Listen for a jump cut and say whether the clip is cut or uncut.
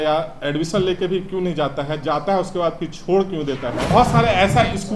cut